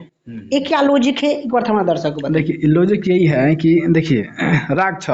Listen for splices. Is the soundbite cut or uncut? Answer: uncut